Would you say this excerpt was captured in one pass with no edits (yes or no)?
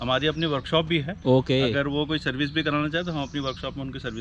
yes